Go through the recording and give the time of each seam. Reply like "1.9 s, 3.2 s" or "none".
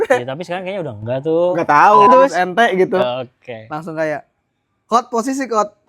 2.1 s